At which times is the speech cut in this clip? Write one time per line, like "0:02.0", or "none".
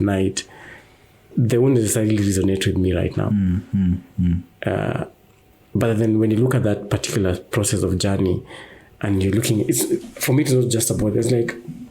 none